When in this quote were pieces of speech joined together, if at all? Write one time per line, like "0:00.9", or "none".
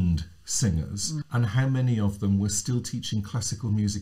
0:01.2